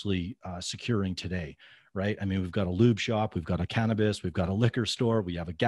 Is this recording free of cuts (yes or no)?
yes